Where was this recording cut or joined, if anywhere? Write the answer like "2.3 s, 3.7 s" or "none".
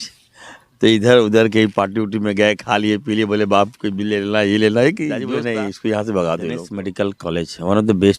5.2 s, 6.8 s